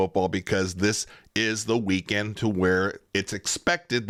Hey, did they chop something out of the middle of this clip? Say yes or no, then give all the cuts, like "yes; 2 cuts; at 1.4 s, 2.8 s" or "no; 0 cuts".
no; 0 cuts